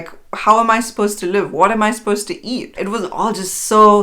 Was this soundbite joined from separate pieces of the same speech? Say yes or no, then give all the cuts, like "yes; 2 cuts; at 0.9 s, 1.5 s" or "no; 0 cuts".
yes; 1 cut; at 2.8 s